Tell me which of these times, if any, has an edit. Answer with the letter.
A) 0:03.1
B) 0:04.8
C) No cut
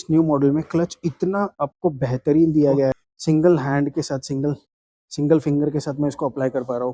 A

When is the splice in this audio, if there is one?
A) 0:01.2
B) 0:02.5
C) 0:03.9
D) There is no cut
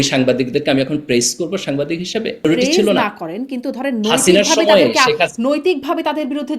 B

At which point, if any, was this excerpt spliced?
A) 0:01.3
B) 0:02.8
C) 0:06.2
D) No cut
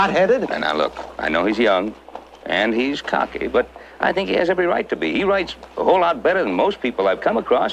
A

